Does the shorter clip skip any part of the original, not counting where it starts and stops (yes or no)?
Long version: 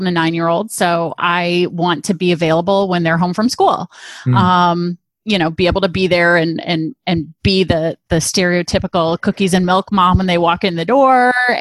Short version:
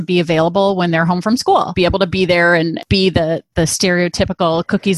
yes